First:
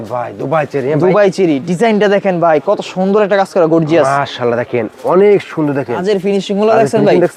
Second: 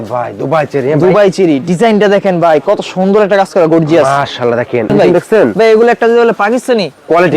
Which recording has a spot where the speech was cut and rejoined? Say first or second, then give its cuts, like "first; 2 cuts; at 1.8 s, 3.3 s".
second; 1 cut; at 4.9 s